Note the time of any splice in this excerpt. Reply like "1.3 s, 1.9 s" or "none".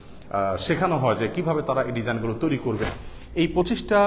2.8 s